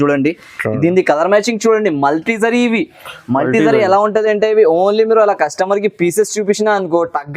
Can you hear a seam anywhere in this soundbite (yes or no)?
no